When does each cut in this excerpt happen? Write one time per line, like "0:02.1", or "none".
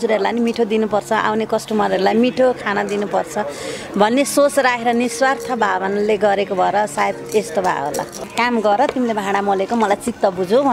0:08.3